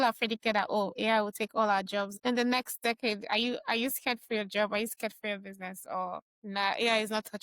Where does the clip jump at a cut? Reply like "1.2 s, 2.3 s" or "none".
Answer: 2.1 s, 6.3 s